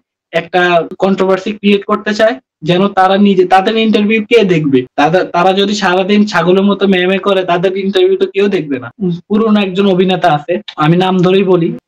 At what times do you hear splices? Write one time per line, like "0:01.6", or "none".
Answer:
0:08.9